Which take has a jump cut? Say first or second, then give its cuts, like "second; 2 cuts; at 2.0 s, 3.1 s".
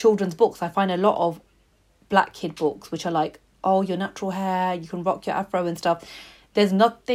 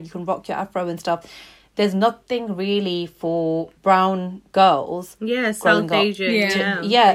second; 1 cut; at 3.7 s